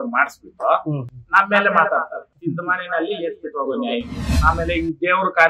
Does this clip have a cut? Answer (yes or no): yes